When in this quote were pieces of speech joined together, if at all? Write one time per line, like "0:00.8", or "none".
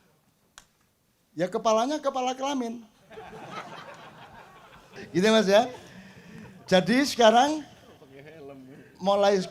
0:05.0

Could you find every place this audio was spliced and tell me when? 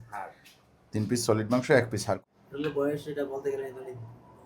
0:02.1

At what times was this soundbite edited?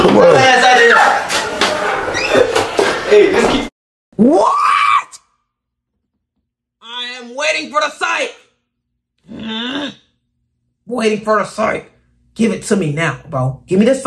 none

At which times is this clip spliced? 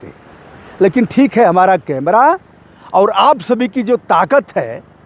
none

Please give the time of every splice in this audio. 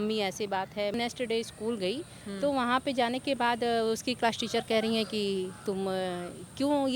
0:00.9

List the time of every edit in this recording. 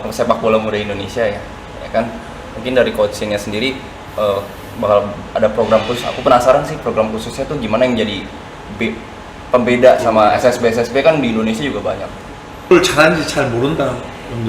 0:12.7

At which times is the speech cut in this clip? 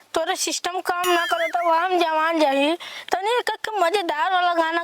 none

